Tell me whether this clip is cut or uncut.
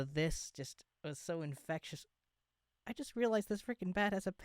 uncut